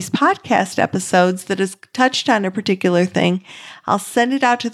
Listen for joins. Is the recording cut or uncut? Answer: uncut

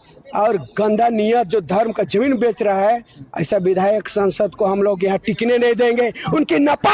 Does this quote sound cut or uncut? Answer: uncut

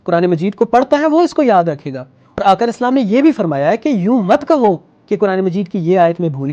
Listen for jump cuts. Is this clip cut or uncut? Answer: cut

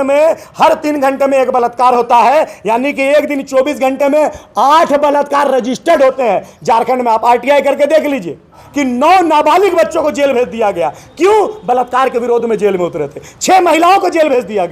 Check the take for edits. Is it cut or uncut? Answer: cut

